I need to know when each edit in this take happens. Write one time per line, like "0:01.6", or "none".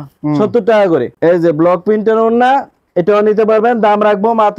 0:01.1